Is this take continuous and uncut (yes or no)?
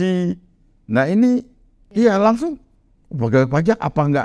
no